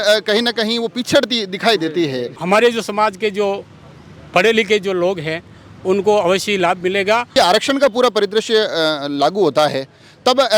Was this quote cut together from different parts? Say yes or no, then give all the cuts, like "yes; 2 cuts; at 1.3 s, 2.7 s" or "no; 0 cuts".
yes; 2 cuts; at 2.3 s, 7.4 s